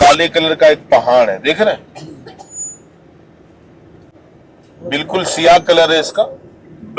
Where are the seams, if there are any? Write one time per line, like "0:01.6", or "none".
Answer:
0:04.1